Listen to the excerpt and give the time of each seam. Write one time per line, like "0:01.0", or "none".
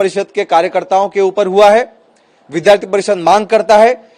none